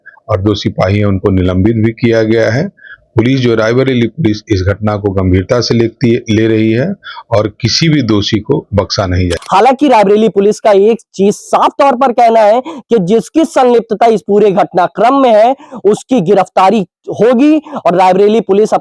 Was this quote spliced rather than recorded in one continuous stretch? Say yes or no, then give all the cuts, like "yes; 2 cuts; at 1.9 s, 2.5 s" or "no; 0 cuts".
yes; 1 cut; at 9.4 s